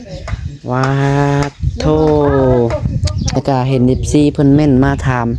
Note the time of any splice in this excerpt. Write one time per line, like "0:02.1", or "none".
0:03.4